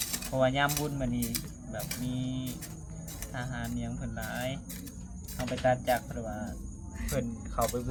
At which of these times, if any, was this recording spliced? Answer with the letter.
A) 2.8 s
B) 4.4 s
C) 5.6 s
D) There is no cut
D